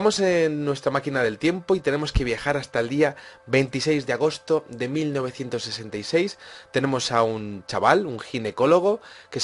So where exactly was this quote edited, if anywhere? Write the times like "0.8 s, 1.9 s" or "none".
3.8 s